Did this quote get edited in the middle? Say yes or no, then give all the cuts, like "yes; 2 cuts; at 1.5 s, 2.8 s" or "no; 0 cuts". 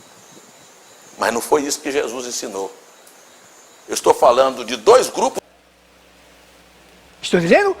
yes; 1 cut; at 5.4 s